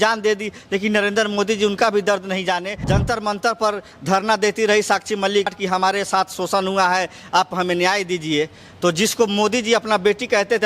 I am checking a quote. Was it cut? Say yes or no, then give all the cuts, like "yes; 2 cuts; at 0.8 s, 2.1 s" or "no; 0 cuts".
yes; 2 cuts; at 2.7 s, 5.6 s